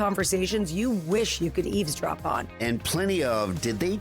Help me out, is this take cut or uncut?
cut